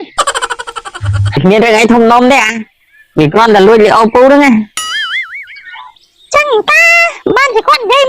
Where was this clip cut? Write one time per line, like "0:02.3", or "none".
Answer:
0:01.4